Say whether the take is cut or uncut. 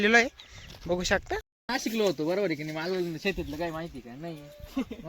cut